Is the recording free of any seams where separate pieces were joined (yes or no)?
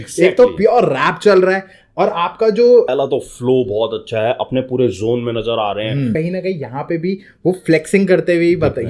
no